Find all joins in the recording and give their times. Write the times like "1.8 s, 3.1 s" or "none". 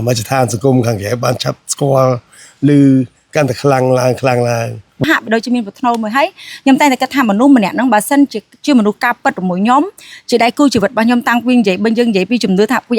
5.0 s